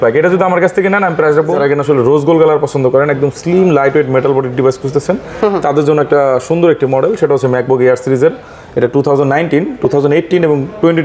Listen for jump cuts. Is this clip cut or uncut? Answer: cut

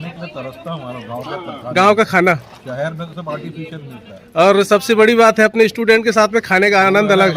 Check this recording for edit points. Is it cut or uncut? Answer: uncut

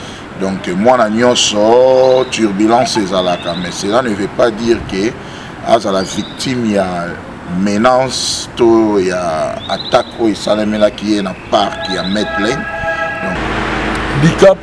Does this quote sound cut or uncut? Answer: cut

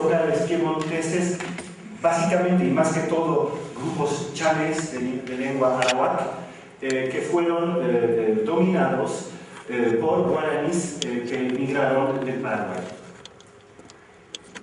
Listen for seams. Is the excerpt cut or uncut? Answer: uncut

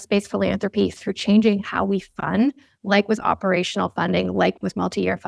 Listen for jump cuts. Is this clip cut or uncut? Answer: uncut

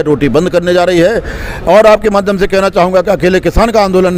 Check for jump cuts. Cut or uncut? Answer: uncut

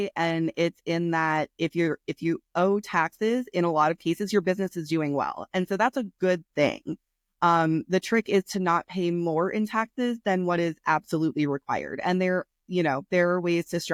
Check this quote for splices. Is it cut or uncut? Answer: uncut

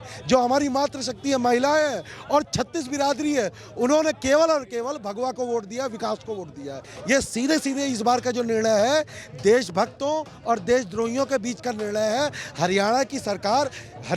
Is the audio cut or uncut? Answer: cut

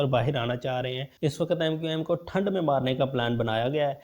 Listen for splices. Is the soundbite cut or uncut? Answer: cut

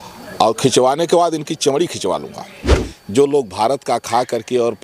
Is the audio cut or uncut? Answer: cut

